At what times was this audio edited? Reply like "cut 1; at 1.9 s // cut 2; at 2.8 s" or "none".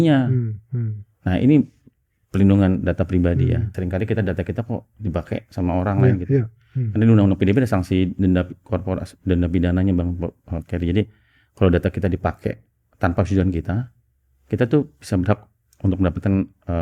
cut 1; at 3.7 s